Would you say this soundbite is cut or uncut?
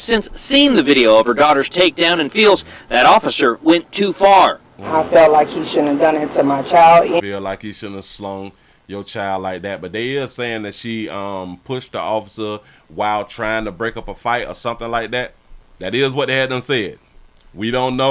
uncut